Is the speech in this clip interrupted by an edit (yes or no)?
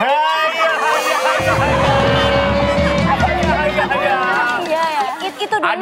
no